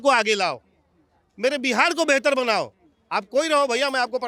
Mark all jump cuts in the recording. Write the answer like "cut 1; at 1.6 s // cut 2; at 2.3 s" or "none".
none

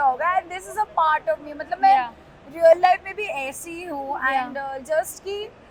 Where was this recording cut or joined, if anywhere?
none

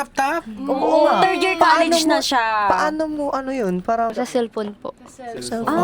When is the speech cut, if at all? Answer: cut 1; at 4.1 s

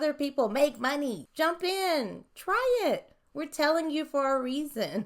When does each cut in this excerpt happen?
cut 1; at 1.2 s

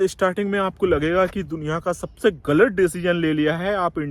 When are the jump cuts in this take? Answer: none

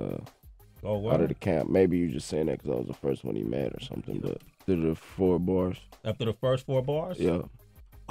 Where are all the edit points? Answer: none

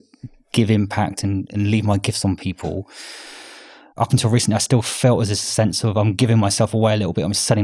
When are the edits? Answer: cut 1; at 3.9 s

